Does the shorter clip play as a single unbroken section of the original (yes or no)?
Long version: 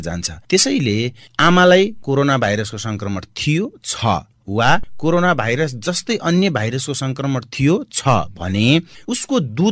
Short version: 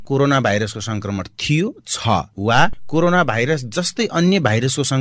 no